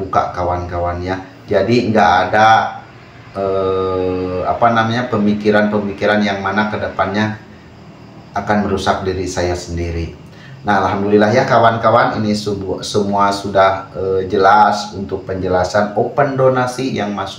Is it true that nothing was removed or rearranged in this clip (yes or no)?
yes